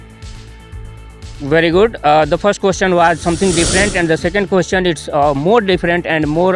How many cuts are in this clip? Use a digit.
1